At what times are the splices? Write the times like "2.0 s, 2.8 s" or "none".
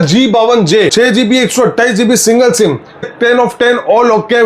0.9 s, 3.1 s